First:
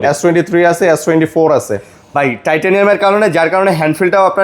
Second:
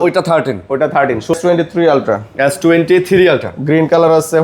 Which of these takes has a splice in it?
second; 1 cut; at 1.3 s

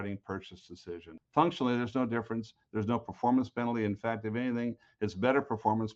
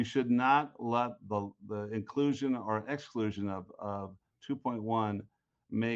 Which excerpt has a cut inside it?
first; 1 cut; at 1.2 s

